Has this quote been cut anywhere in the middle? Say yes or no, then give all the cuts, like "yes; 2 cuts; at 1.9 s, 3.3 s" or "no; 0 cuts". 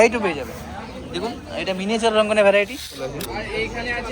yes; 1 cut; at 3.0 s